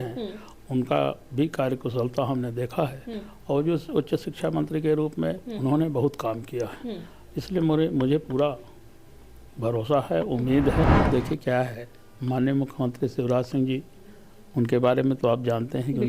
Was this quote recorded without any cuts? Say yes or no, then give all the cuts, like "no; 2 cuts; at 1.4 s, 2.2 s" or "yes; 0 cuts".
no; 1 cut; at 11.0 s